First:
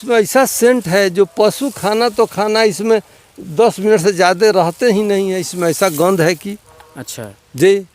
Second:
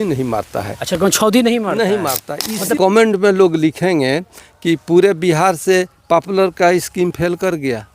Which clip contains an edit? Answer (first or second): second